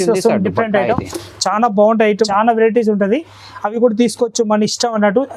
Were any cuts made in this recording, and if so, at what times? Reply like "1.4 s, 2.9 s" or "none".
2.2 s